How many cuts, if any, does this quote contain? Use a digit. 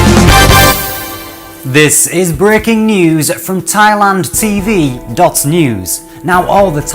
1